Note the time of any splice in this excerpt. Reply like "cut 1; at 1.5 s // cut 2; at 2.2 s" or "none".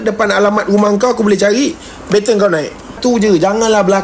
cut 1; at 3.0 s